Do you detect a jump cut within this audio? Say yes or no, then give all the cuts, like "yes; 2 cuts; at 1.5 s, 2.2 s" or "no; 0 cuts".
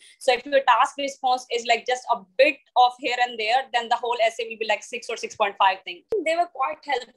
yes; 1 cut; at 6.1 s